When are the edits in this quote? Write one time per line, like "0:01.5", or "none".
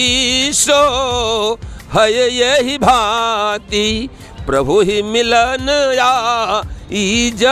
none